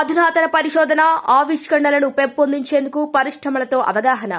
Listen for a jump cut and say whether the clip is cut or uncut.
uncut